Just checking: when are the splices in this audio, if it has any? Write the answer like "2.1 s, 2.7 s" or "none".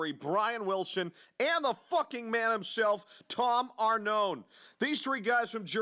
none